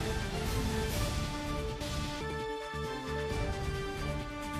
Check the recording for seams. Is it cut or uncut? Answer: uncut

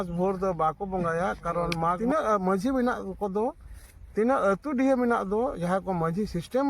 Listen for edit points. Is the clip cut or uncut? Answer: cut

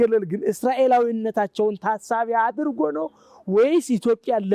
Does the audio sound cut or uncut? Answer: uncut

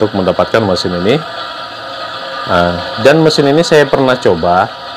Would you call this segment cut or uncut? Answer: uncut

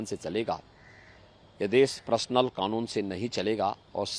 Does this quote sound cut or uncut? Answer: uncut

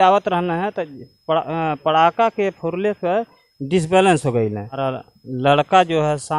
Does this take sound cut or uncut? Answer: cut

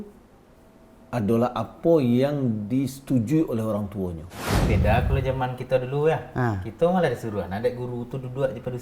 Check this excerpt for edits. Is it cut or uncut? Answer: cut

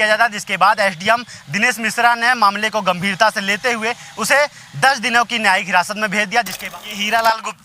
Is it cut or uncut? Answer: cut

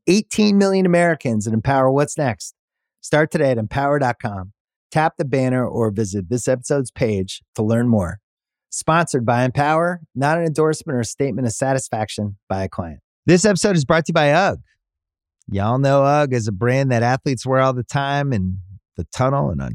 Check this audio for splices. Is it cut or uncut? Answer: cut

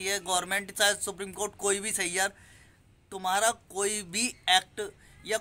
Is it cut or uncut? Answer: uncut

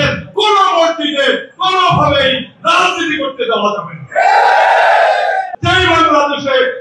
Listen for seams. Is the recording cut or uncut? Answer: cut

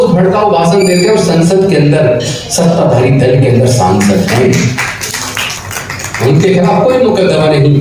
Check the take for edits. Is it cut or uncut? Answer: uncut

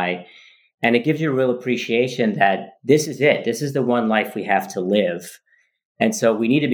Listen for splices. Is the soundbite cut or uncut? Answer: uncut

